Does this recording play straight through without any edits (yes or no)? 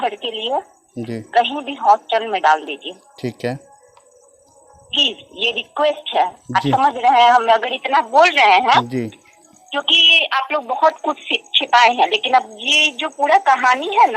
yes